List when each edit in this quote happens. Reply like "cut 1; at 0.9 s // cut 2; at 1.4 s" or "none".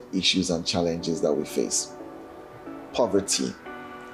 none